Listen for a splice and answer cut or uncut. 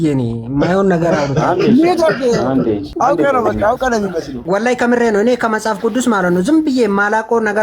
cut